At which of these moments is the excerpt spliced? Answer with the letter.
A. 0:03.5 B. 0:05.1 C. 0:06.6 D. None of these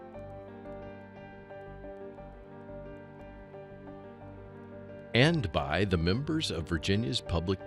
B